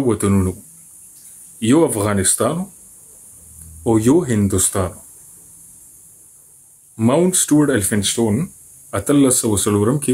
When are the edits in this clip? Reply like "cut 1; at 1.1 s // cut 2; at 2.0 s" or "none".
none